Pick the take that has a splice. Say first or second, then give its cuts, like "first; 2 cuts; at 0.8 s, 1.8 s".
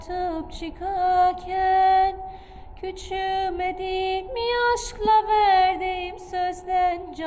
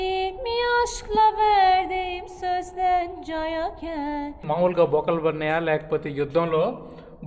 second; 1 cut; at 4.4 s